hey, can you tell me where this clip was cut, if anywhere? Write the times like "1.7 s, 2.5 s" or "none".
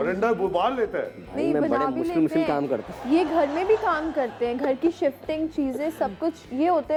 none